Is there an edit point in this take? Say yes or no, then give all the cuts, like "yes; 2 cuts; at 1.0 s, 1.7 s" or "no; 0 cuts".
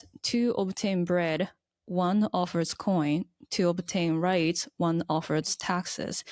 no; 0 cuts